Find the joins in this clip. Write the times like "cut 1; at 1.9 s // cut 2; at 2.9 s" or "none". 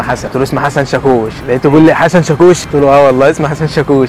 none